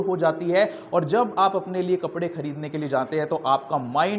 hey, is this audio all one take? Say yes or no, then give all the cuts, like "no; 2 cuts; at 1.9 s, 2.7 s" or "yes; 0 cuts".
yes; 0 cuts